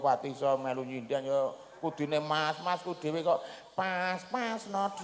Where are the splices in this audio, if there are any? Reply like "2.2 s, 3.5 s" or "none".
none